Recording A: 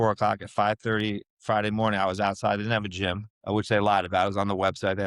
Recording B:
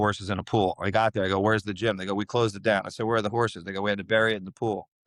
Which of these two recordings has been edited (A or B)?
A